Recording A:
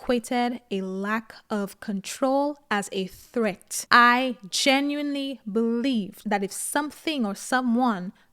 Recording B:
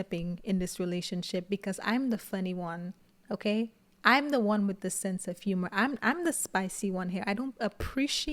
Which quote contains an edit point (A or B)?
A